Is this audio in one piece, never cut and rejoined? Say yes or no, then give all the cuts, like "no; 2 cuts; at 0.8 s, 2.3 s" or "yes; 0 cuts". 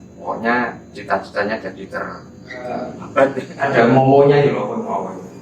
no; 1 cut; at 3.5 s